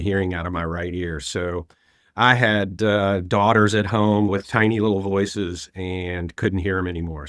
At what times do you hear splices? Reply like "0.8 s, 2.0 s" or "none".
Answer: 4.3 s